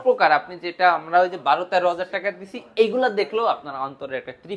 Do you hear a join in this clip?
no; 0 cuts

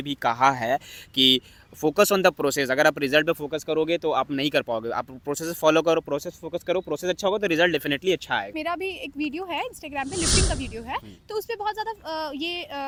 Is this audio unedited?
yes; 0 cuts

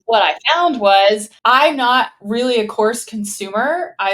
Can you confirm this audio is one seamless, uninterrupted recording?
no; 1 cut; at 1.3 s

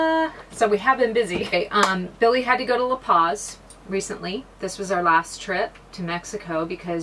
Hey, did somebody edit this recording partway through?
yes; 1 cut; at 1.5 s

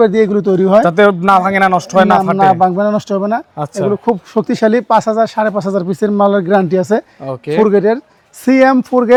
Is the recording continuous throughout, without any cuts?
yes; 0 cuts

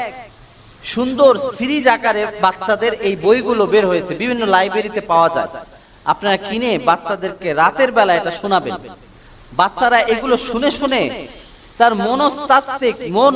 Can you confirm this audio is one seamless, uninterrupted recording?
yes; 0 cuts

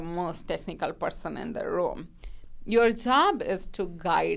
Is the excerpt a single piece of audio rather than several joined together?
yes; 0 cuts

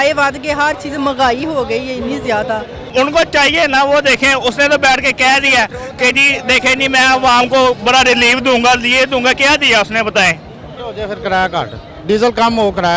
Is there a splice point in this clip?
yes; 2 cuts; at 2.8 s, 10.8 s

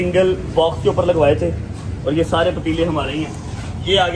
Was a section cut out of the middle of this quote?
no; 0 cuts

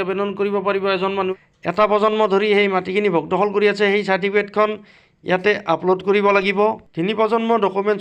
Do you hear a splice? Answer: yes; 1 cut; at 1.3 s

